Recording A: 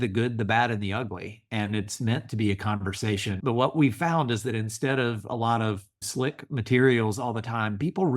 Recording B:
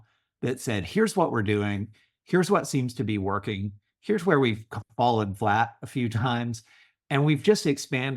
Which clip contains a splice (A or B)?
A